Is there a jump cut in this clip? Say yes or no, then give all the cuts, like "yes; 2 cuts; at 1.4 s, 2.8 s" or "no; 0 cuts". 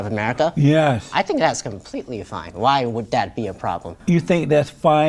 yes; 1 cut; at 3.9 s